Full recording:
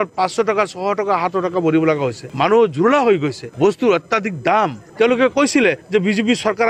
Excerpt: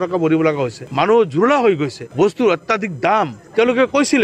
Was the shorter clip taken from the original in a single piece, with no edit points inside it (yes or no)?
yes